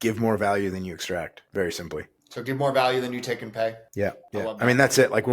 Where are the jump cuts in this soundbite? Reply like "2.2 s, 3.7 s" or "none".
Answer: 1.4 s, 2.2 s, 4.1 s